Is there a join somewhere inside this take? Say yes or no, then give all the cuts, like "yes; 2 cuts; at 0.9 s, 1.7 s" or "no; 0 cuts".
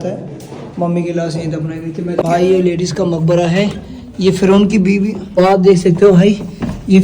yes; 2 cuts; at 2.2 s, 5.4 s